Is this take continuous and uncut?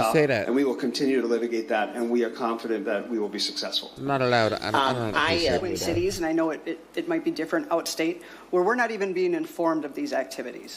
no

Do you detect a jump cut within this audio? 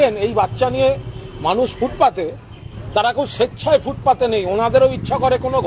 no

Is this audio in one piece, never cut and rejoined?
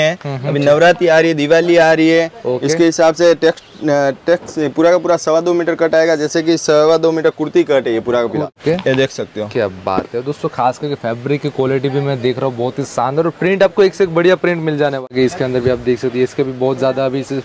no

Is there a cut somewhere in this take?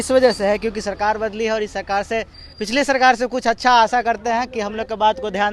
no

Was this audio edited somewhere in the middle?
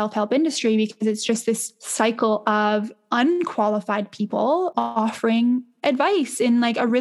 yes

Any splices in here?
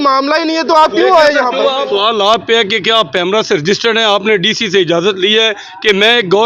yes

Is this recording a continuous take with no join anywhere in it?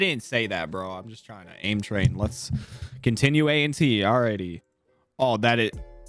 yes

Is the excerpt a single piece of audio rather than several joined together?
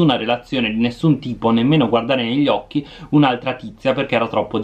yes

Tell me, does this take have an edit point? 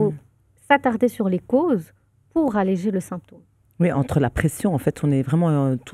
no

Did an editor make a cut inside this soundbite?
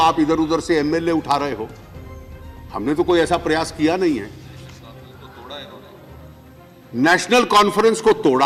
no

